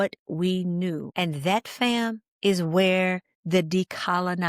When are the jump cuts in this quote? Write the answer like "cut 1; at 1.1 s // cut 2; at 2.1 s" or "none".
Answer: cut 1; at 1.1 s // cut 2; at 2.2 s // cut 3; at 3.3 s